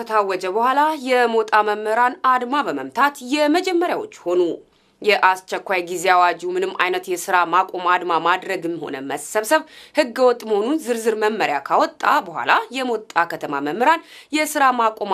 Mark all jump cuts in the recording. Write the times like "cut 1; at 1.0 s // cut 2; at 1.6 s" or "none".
none